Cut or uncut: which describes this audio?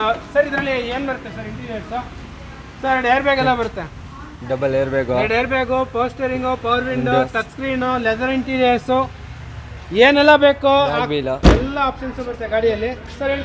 uncut